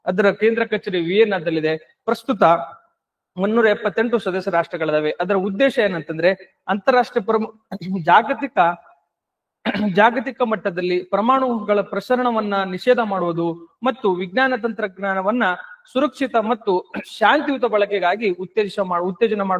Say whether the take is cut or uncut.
uncut